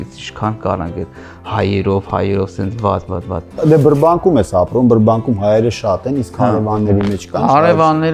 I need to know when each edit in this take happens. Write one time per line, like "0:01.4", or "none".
0:03.5

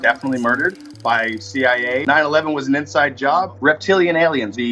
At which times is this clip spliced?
0:02.0
0:03.6

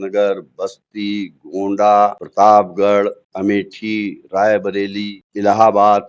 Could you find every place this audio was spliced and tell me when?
0:02.2
0:03.2
0:05.2

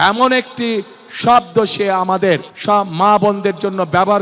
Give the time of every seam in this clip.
0:02.5

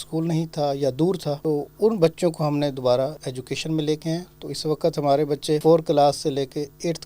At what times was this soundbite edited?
0:01.4
0:03.3
0:05.6

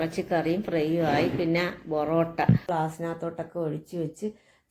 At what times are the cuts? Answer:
0:02.6

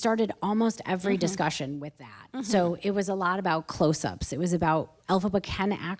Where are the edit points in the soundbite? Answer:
0:04.9

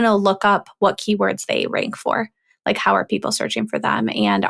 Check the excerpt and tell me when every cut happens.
none

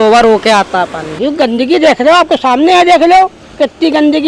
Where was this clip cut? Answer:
0:01.1
0:03.4

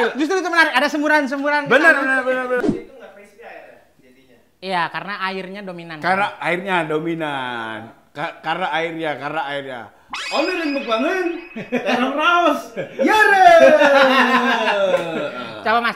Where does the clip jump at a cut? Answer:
0:02.6

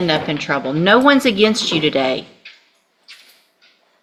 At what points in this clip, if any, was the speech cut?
none

